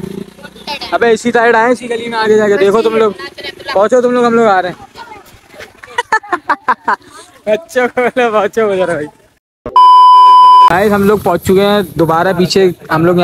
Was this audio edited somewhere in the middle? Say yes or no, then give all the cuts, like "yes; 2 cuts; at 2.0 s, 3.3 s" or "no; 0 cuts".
no; 0 cuts